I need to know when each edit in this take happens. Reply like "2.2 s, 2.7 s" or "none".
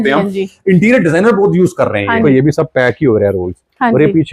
2.2 s